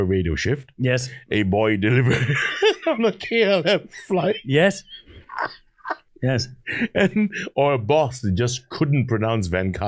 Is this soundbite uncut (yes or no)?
no